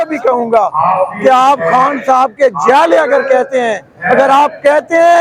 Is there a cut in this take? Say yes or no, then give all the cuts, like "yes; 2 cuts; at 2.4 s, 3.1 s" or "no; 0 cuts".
no; 0 cuts